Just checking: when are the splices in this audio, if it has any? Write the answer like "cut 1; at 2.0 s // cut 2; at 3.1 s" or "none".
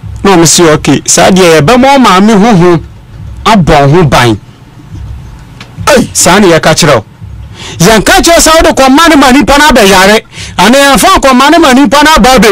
none